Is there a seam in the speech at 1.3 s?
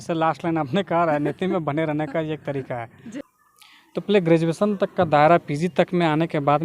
no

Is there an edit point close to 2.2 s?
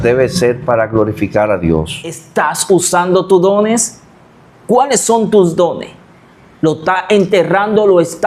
yes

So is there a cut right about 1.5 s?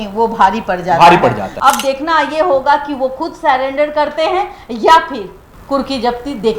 yes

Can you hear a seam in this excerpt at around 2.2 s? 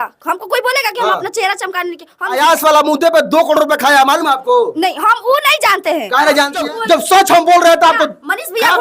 yes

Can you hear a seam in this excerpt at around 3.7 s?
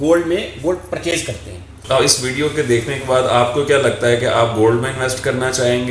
no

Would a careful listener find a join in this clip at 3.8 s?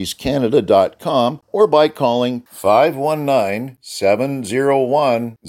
no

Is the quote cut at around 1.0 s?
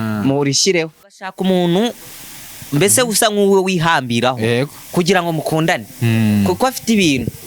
yes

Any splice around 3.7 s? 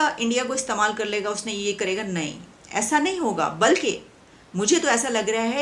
no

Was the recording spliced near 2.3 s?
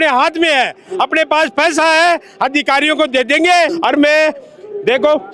no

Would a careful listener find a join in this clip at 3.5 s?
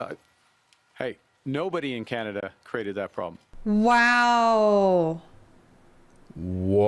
yes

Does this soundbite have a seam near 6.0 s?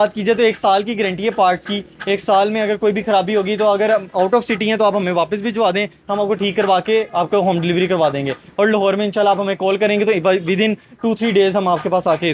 no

